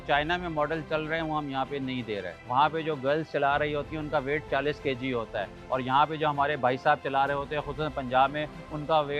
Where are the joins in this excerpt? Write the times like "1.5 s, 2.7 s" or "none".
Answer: 2.3 s, 5.6 s